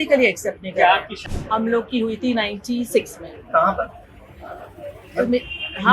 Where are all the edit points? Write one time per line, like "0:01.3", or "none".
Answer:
0:01.1